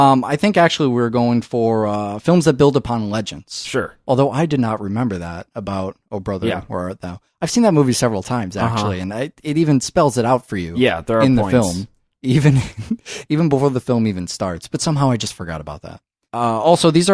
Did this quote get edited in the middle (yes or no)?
yes